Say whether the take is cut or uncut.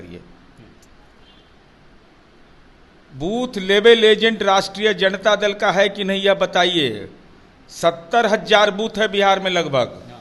uncut